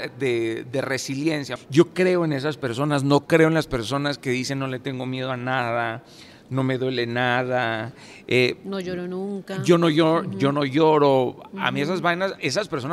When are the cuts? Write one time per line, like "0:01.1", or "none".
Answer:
0:01.5